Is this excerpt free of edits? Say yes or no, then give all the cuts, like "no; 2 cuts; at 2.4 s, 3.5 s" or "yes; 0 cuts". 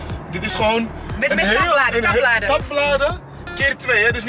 yes; 0 cuts